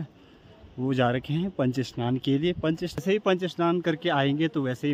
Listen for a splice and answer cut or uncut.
cut